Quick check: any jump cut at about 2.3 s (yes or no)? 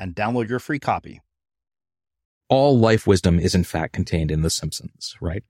yes